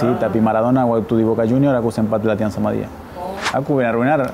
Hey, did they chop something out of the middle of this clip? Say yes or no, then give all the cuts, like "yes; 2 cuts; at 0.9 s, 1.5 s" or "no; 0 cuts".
yes; 1 cut; at 3.1 s